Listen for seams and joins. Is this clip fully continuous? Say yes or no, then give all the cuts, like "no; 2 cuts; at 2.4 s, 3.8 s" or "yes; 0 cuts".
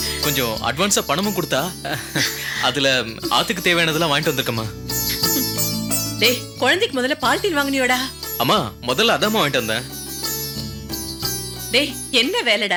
yes; 0 cuts